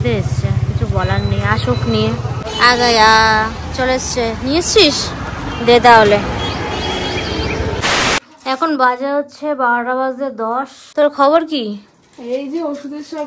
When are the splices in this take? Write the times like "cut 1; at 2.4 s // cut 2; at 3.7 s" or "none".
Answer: none

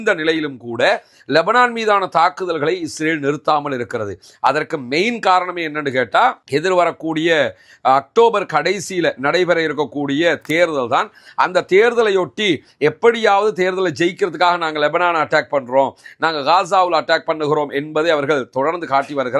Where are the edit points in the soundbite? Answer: none

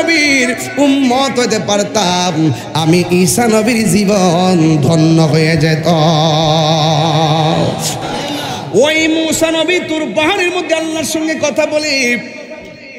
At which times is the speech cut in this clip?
cut 1; at 8.0 s

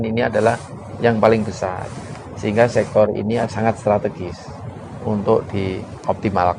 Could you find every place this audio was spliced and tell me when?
cut 1; at 3.5 s

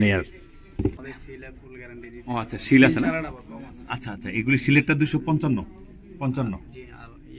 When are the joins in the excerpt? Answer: cut 1; at 1.0 s

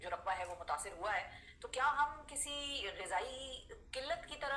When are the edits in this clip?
none

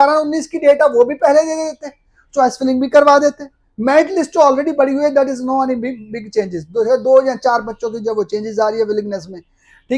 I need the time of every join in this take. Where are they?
none

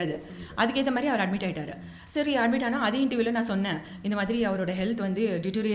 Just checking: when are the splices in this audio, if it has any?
none

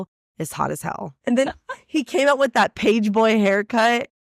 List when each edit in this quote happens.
cut 1; at 1.2 s

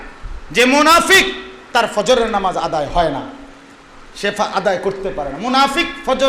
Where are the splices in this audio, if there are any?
none

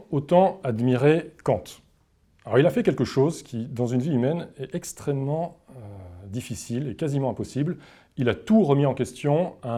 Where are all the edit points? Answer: none

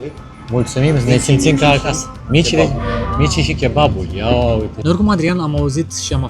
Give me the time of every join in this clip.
cut 1; at 4.8 s

